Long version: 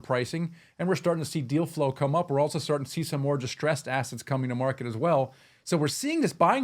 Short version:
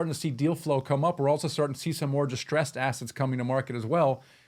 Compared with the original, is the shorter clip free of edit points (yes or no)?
yes